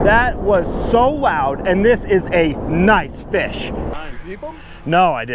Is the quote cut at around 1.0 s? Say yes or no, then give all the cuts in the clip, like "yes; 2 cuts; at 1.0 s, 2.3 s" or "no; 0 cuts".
no; 1 cut; at 3.9 s